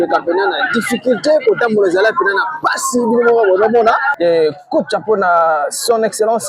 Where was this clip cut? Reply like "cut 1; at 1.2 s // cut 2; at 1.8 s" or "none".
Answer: cut 1; at 4.1 s